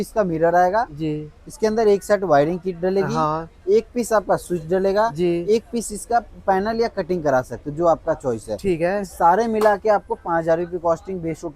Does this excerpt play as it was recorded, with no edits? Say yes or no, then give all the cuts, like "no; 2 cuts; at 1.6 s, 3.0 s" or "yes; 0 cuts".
yes; 0 cuts